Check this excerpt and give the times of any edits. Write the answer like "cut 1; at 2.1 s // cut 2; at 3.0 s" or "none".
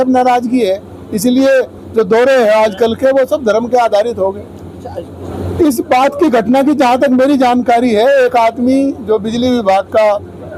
cut 1; at 5.2 s